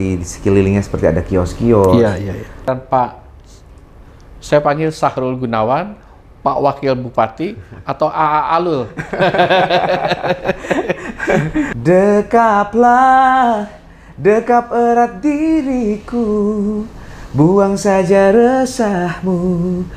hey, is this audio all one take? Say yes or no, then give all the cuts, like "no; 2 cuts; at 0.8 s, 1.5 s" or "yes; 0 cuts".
no; 2 cuts; at 2.7 s, 11.7 s